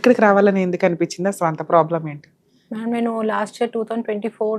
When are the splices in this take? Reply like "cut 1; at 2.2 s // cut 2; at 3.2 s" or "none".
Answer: none